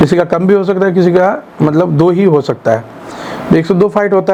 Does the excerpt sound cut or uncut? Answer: uncut